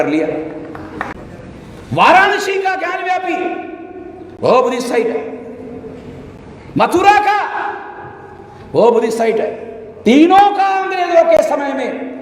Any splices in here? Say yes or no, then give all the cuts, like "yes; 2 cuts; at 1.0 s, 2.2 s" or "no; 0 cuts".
yes; 1 cut; at 1.1 s